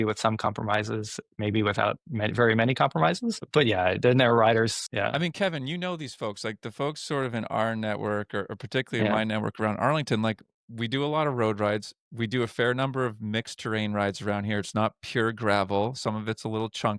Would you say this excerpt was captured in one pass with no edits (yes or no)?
yes